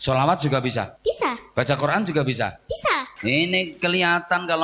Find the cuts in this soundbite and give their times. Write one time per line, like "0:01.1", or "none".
0:00.9
0:03.1